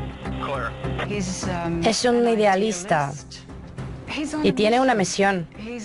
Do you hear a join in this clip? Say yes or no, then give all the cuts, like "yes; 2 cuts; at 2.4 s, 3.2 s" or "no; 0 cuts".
no; 0 cuts